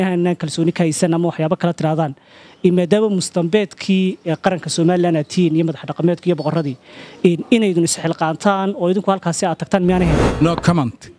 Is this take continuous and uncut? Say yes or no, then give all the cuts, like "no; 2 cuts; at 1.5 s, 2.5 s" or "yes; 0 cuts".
no; 1 cut; at 10.2 s